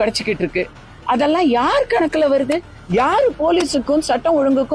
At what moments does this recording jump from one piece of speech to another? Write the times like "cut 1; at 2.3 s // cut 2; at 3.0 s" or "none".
none

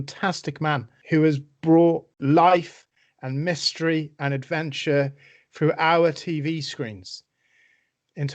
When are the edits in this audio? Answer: cut 1; at 0.9 s // cut 2; at 2.1 s

